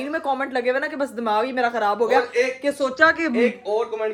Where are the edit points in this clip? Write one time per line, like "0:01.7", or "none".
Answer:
none